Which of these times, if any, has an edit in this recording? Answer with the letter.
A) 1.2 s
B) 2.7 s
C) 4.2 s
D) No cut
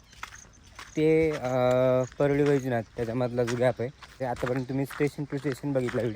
C